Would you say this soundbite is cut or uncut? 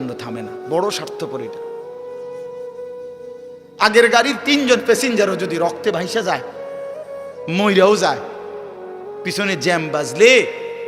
cut